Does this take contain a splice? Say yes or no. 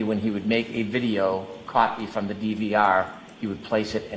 no